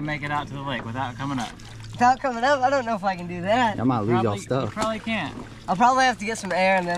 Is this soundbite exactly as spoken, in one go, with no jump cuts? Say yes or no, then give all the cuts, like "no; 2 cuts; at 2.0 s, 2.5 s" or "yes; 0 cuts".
yes; 0 cuts